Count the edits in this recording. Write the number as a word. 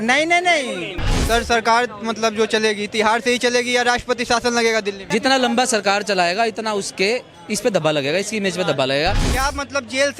three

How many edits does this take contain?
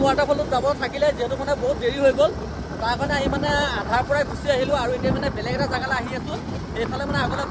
zero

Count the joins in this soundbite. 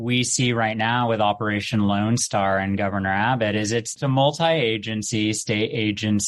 one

